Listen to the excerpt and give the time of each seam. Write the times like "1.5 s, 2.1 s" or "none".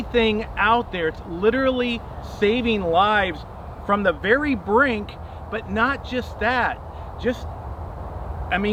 none